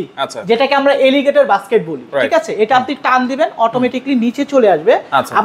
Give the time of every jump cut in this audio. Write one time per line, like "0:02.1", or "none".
none